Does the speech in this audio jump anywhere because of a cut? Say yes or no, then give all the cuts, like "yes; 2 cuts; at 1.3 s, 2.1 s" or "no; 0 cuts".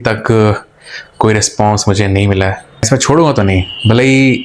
yes; 1 cut; at 2.9 s